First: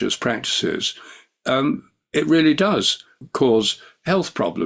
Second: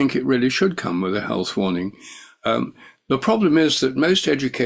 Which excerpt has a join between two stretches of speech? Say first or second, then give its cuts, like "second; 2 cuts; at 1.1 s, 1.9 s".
first; 1 cut; at 3.1 s